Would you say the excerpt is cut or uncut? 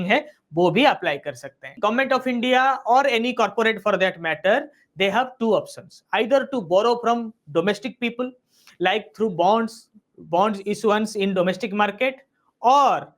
cut